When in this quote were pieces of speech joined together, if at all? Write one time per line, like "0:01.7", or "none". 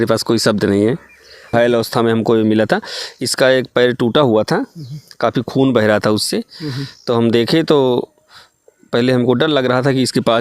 0:01.5